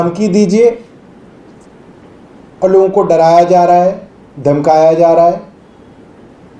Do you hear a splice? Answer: no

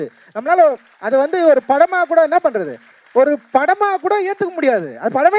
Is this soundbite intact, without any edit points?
yes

